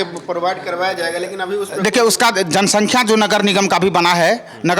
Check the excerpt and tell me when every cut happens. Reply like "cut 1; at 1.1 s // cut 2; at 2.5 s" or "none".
none